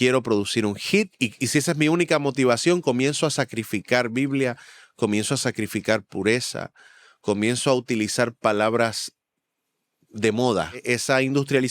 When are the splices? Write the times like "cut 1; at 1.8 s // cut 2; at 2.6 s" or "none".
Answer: cut 1; at 1.1 s // cut 2; at 10.8 s